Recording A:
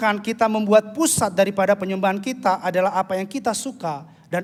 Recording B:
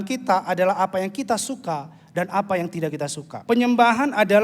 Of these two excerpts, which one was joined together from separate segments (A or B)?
B